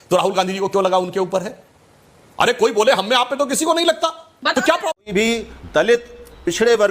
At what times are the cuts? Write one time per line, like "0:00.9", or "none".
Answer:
0:05.0